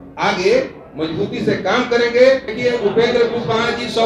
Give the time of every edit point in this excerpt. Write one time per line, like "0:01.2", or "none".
0:02.5